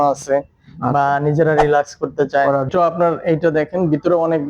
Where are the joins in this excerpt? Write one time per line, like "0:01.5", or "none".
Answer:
0:02.7